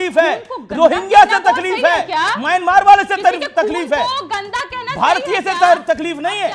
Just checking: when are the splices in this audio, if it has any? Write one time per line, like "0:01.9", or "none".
none